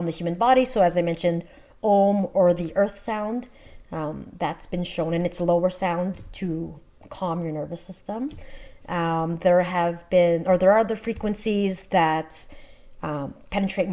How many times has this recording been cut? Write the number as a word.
zero